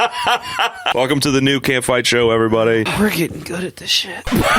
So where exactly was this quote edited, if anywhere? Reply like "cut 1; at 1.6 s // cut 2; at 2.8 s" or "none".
cut 1; at 0.9 s // cut 2; at 2.9 s